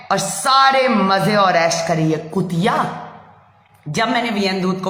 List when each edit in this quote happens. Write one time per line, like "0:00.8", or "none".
none